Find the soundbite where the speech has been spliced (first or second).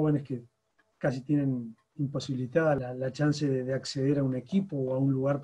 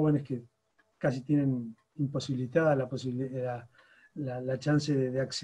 first